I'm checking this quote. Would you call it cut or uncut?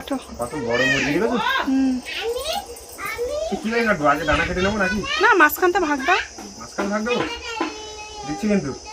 uncut